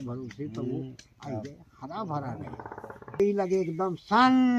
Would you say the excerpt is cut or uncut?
cut